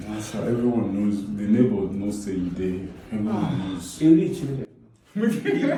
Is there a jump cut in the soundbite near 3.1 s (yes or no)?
no